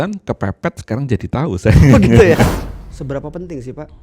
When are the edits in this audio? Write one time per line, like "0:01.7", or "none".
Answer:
0:02.6